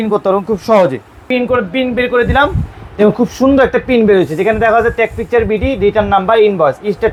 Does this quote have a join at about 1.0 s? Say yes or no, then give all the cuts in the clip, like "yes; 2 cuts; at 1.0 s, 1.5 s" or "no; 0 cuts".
no; 0 cuts